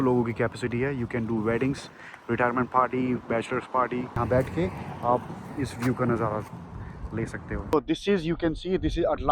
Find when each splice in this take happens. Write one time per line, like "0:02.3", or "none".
0:04.2
0:07.7